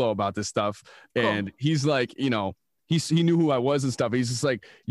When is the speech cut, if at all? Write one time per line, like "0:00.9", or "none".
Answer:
none